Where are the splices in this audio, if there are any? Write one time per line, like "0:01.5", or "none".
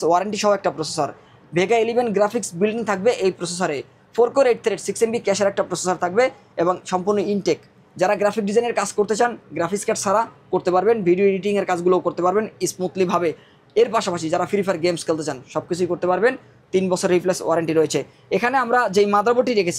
none